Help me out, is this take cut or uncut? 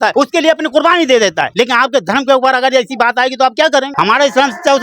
cut